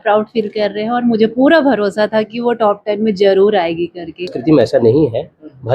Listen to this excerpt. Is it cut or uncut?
cut